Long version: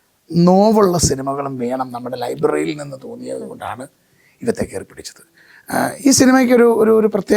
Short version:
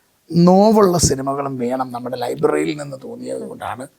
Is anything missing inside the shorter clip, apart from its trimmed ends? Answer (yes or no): no